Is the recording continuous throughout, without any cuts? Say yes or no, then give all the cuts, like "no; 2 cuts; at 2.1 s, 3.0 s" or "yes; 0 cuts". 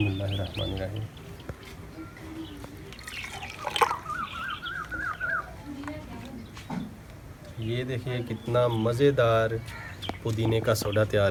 yes; 0 cuts